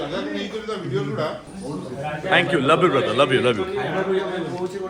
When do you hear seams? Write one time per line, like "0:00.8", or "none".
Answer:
none